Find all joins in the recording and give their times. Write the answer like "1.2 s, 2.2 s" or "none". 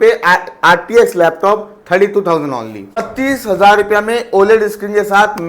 3.1 s